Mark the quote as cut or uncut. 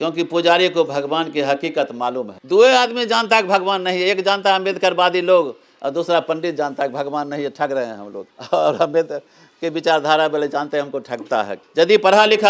uncut